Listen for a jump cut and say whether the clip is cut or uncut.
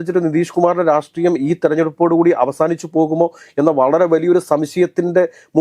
uncut